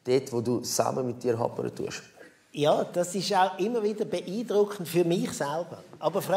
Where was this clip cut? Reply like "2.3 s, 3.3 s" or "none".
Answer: 2.7 s